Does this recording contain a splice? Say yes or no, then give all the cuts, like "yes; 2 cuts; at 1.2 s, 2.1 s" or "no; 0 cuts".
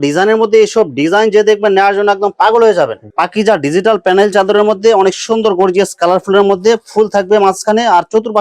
yes; 1 cut; at 3.0 s